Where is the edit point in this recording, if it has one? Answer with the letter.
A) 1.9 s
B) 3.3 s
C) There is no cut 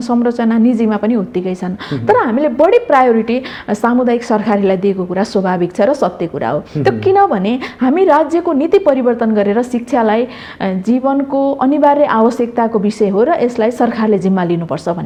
C